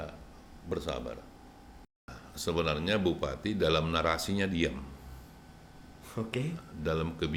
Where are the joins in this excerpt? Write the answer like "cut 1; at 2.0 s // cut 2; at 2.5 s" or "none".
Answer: cut 1; at 2.1 s